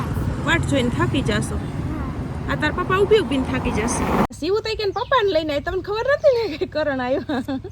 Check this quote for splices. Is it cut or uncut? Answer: cut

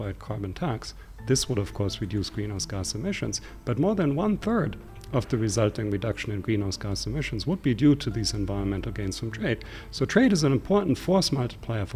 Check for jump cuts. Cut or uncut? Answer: uncut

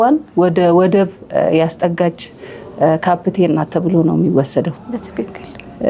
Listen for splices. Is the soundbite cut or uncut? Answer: uncut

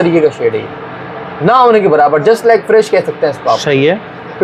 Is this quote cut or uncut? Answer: uncut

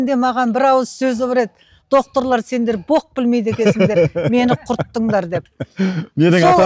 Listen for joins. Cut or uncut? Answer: uncut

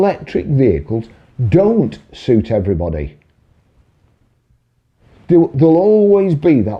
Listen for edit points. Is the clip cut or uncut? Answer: uncut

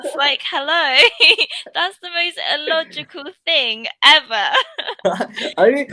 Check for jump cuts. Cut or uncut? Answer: uncut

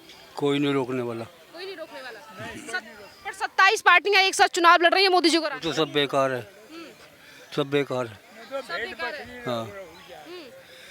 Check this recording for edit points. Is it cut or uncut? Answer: uncut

